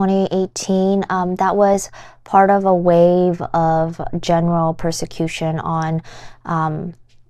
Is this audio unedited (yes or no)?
yes